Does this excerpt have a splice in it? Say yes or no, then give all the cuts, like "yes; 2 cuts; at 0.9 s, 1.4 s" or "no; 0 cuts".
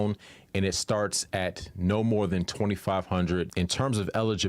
yes; 1 cut; at 3.5 s